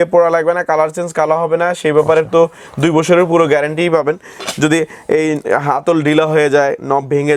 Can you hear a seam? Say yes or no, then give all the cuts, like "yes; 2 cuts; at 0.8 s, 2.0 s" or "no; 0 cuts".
no; 0 cuts